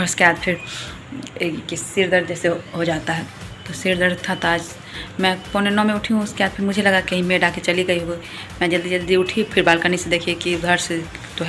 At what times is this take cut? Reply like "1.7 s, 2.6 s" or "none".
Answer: none